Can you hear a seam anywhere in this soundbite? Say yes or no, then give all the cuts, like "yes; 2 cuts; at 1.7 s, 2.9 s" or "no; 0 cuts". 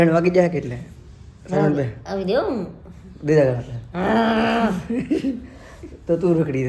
no; 0 cuts